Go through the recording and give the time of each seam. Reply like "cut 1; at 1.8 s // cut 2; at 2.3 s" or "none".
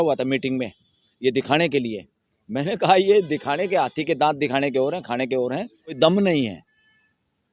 cut 1; at 6.0 s